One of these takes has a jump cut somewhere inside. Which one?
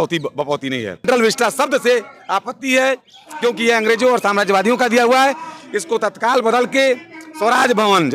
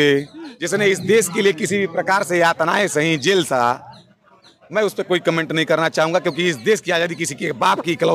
first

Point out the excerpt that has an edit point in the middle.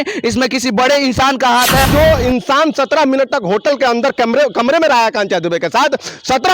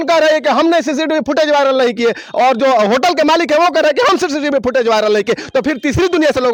first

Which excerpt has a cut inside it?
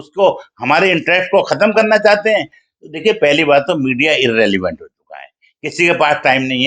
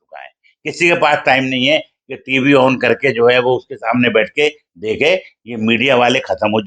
first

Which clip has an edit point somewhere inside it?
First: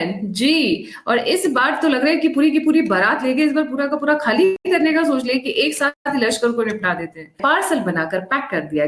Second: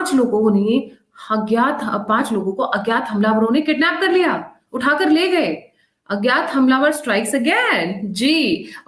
first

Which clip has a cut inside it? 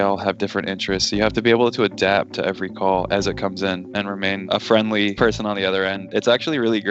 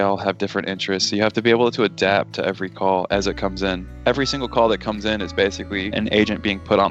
first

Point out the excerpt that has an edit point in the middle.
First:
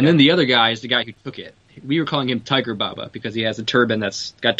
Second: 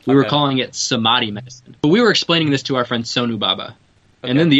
second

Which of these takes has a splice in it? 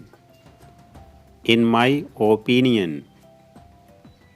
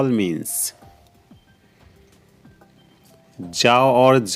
first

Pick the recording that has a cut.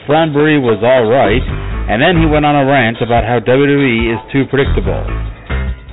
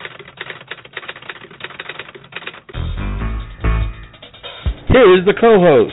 second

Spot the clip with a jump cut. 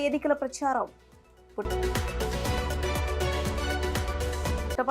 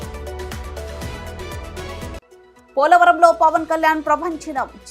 second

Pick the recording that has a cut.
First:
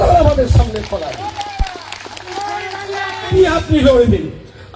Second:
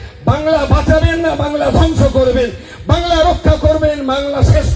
first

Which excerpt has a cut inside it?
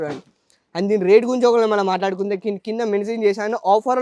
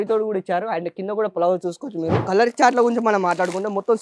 second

